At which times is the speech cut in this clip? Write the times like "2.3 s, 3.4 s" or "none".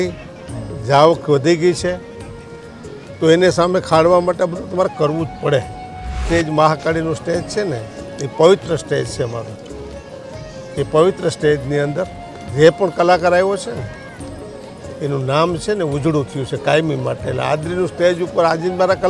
6.2 s